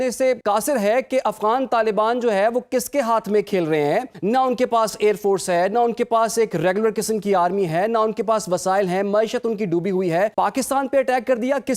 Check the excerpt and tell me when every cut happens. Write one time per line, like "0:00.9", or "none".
0:10.3

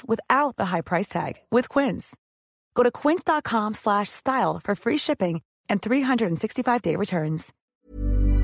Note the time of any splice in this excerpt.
0:07.5

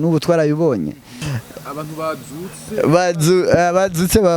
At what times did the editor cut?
0:01.2

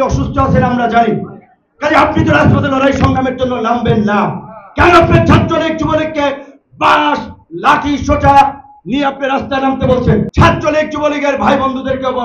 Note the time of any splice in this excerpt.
0:10.3

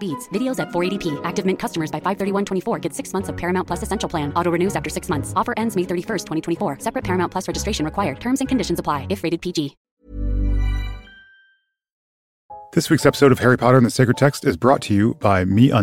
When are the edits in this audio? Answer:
0:12.7

